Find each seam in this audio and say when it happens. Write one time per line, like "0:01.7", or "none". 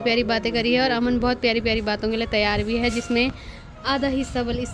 none